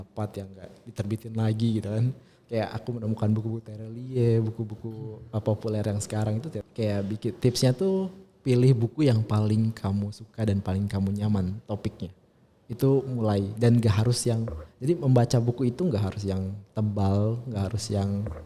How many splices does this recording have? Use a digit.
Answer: 1